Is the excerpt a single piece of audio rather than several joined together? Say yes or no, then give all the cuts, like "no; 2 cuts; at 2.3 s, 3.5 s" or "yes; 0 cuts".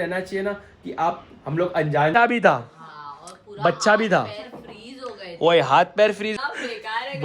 no; 2 cuts; at 2.2 s, 6.3 s